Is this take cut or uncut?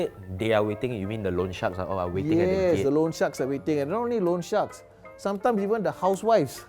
uncut